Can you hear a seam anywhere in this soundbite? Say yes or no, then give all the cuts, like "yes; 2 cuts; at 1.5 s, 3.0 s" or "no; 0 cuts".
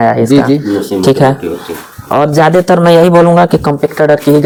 no; 0 cuts